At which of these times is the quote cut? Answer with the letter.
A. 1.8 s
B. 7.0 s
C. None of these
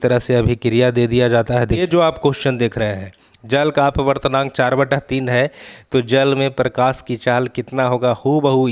A